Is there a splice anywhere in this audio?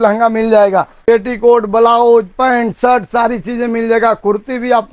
yes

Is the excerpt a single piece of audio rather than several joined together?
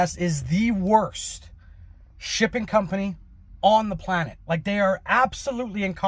yes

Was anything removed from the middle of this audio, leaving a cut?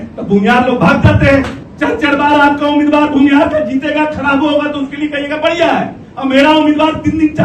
yes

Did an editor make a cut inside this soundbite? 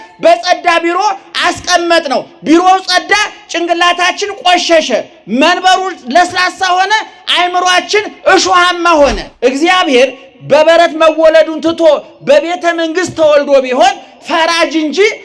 yes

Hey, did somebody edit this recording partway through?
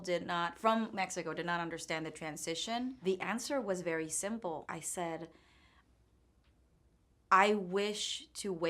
yes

